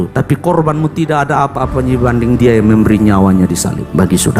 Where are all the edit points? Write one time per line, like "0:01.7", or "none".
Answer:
none

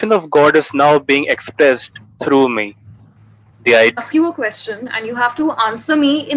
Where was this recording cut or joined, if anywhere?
0:04.0

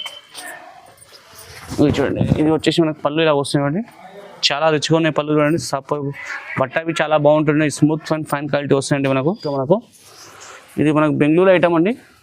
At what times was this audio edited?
0:09.5

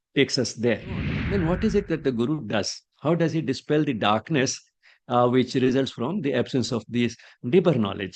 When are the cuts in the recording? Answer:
0:01.2

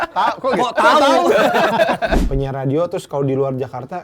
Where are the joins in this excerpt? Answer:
0:02.2

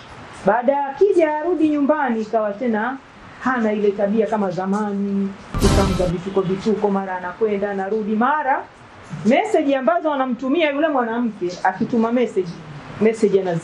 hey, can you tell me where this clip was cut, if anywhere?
none

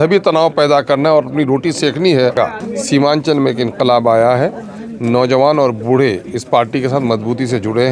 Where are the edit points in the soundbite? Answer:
0:02.6

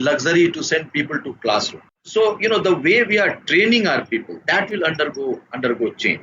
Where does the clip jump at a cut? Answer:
0:02.0

